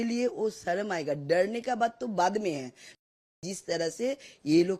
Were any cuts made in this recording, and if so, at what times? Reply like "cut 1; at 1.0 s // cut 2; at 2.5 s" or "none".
cut 1; at 3.0 s